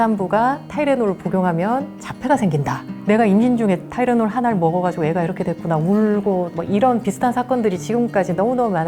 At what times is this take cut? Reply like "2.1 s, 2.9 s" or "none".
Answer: 6.5 s

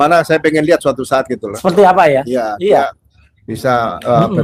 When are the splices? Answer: none

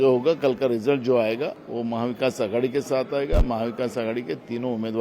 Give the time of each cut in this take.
1.6 s

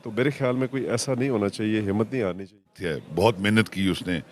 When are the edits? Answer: 2.8 s

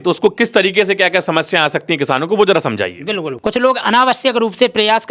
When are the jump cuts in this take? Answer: 3.3 s

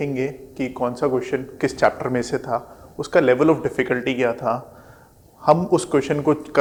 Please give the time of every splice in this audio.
none

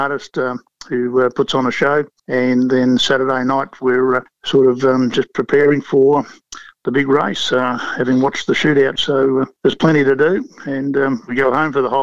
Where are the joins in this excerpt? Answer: 2.2 s, 4.3 s, 9.5 s

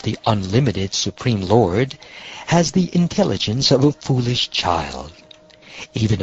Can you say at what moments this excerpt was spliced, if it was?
none

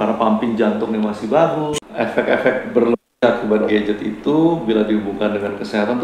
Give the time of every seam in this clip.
1.7 s

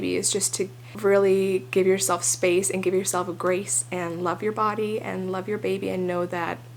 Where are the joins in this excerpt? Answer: none

